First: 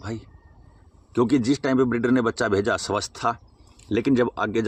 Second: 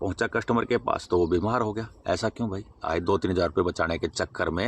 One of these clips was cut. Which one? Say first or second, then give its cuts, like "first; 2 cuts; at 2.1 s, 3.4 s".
second; 1 cut; at 2.8 s